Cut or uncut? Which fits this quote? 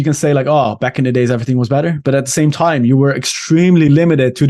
uncut